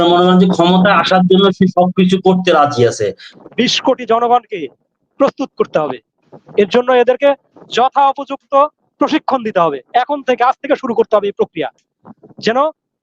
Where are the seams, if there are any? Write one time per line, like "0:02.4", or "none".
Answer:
0:03.3